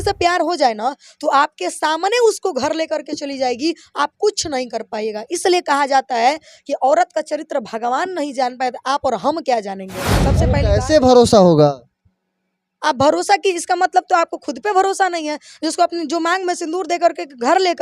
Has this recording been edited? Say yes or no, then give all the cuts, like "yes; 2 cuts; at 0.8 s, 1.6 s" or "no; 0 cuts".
yes; 1 cut; at 10.2 s